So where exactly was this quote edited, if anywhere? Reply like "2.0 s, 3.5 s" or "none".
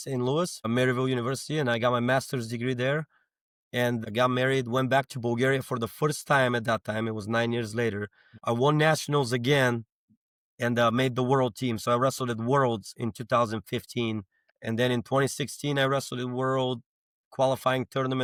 none